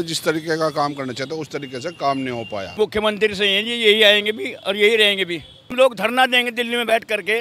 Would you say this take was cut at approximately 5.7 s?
yes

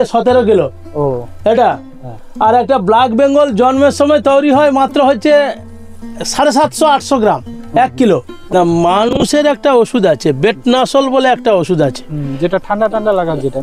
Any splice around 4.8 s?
no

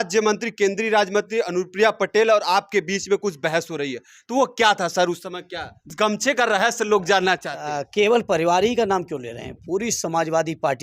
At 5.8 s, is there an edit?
yes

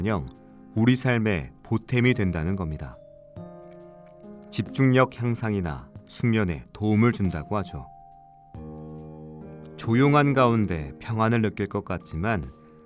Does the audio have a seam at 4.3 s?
yes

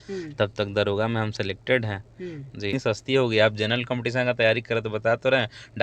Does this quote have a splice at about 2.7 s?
yes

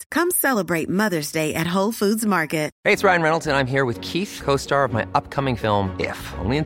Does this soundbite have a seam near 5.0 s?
no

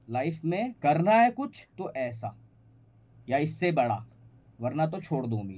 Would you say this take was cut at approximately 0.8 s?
yes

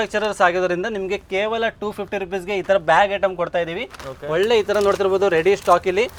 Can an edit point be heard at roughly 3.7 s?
no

